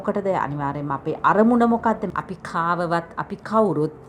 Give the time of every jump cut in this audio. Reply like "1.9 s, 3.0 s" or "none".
2.1 s